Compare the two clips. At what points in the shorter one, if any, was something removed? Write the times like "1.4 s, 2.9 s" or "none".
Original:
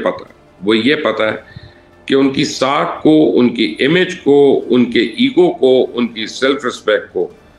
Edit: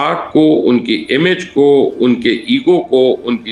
none